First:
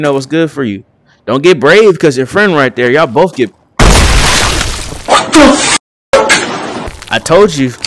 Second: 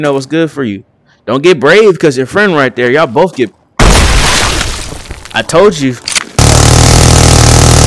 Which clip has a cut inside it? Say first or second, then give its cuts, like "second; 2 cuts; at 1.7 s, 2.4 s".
second; 2 cuts; at 5.0 s, 6.5 s